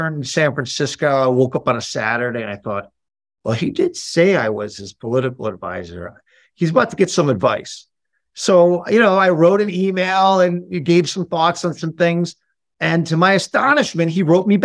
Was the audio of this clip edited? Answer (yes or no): no